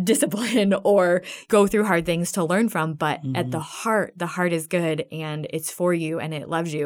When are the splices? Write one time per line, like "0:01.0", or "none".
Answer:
0:01.3